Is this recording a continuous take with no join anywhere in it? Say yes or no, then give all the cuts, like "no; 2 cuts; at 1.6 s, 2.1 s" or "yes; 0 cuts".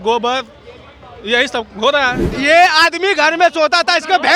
no; 1 cut; at 2.3 s